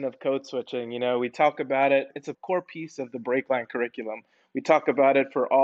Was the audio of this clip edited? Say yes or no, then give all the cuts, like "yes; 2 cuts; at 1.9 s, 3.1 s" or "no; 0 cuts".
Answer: yes; 1 cut; at 2.2 s